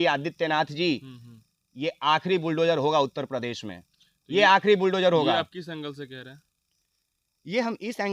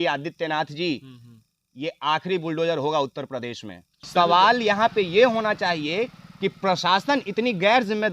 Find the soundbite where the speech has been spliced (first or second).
second